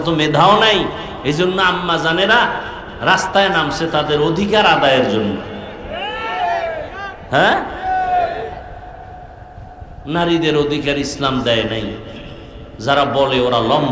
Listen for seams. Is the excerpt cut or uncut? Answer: uncut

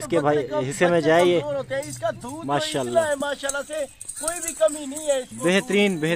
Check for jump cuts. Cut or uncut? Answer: uncut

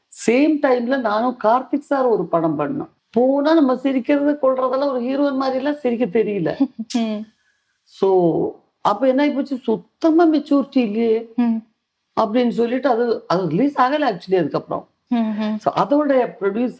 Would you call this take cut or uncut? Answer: cut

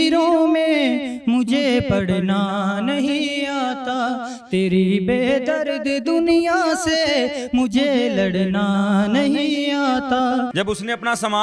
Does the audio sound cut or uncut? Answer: cut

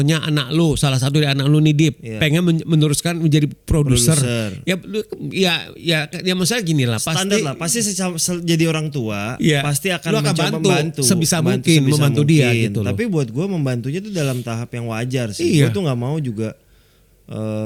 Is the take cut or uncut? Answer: uncut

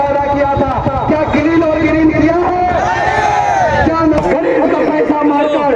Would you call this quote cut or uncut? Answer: cut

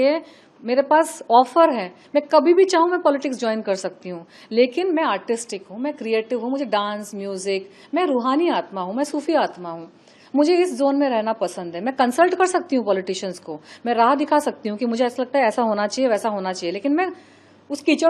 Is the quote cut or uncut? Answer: uncut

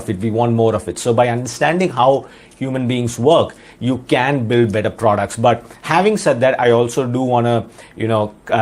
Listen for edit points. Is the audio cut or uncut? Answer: uncut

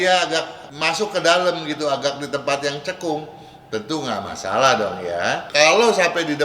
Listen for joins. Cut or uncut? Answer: cut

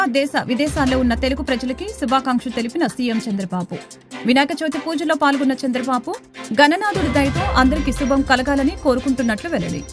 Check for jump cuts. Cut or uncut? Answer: uncut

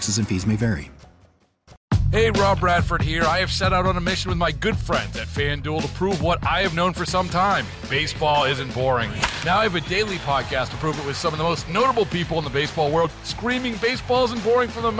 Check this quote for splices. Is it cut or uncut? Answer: cut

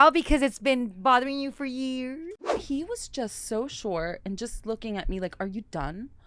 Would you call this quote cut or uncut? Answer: cut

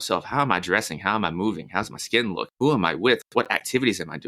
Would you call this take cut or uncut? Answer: cut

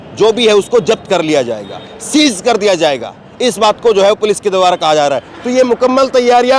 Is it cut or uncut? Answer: uncut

